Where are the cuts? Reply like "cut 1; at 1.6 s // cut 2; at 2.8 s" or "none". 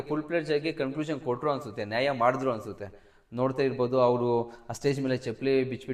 none